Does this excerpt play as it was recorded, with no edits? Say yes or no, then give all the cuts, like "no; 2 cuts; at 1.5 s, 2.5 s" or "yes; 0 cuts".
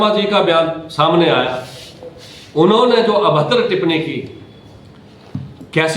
yes; 0 cuts